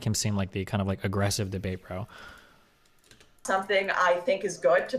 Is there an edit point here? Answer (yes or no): no